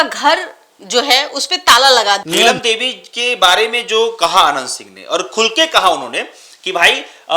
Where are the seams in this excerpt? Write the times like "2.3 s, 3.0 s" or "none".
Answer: 2.2 s